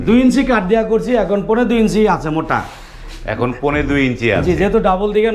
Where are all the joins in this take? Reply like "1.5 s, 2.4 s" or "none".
none